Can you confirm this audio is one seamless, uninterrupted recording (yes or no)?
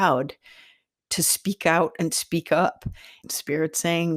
no